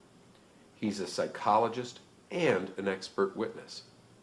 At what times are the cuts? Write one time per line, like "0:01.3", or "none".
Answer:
none